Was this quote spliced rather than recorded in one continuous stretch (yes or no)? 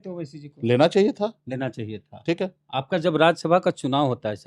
no